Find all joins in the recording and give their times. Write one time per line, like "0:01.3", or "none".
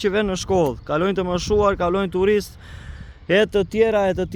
none